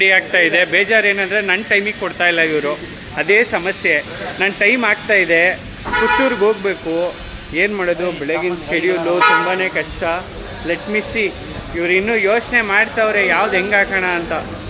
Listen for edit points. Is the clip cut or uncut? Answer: uncut